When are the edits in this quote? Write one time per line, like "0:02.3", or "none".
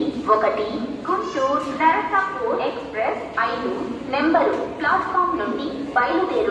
none